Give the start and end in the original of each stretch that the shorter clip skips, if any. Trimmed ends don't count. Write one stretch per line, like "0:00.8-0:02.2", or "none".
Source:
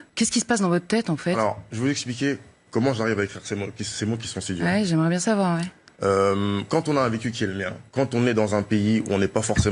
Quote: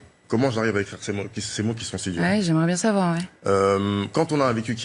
0:05.7-0:05.9